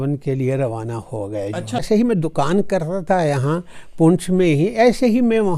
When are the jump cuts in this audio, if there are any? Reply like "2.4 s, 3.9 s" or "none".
1.8 s